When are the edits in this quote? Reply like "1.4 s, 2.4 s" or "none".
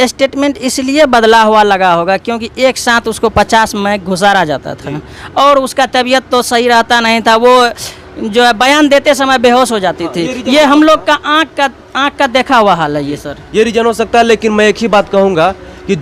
none